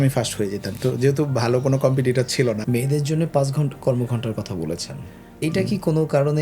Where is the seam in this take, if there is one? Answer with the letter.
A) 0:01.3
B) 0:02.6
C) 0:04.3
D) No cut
B